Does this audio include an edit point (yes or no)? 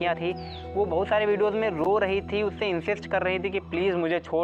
no